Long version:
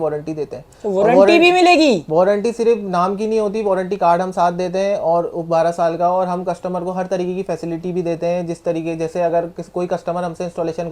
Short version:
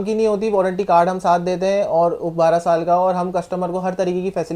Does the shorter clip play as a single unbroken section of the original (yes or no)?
yes